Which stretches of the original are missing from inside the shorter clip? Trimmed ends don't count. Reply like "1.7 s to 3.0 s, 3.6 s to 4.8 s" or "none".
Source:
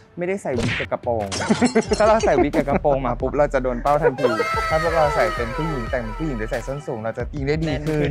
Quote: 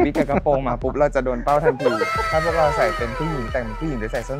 none